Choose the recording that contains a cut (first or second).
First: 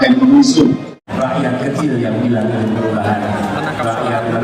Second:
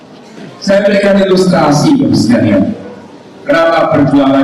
first